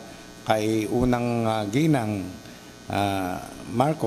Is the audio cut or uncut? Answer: uncut